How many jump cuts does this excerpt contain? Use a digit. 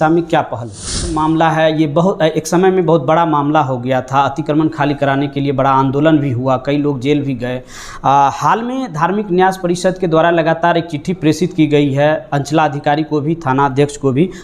1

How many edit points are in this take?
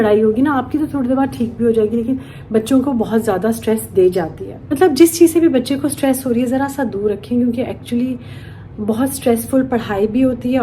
1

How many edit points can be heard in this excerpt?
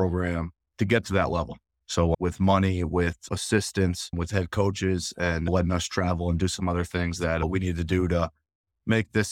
1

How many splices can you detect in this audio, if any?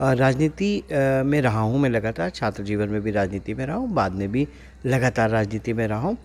0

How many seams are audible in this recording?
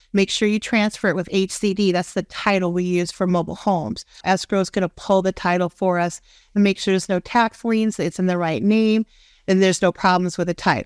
1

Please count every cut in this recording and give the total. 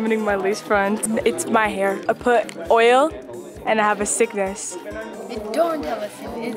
2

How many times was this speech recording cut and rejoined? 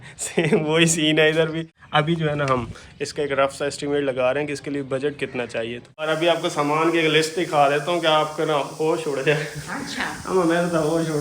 2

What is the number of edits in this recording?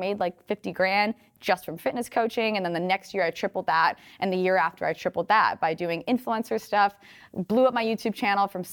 0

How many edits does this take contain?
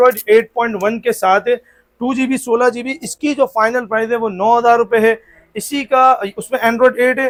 0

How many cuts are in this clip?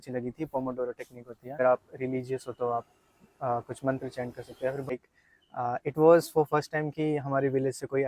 2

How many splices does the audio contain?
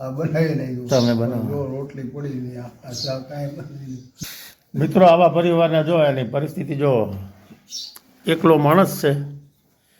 1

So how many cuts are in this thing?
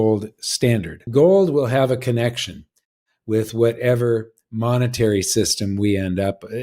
1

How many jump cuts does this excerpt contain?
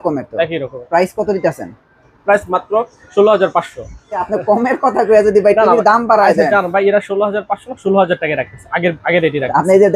1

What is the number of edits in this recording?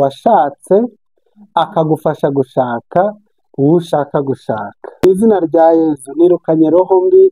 1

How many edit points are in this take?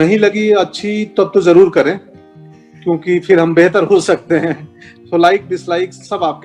0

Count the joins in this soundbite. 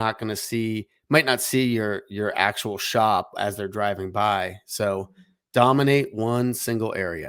0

